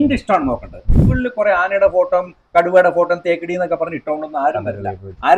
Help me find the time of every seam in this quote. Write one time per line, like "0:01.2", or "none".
0:01.0

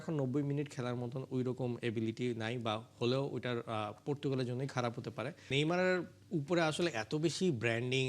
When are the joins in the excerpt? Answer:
0:05.4

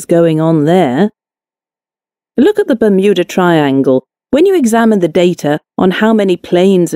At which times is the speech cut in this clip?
none

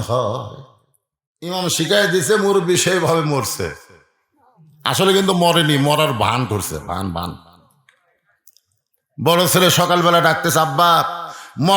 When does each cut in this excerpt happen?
0:01.5

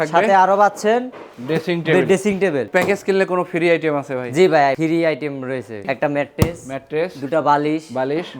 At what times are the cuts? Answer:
0:02.7
0:04.8
0:05.8

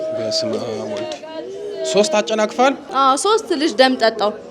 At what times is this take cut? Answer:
0:02.9

